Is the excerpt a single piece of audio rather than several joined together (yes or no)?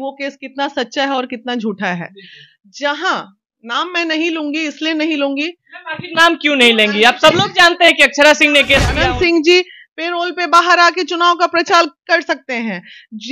no